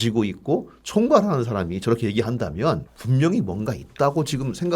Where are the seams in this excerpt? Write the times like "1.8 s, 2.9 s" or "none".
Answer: 2.9 s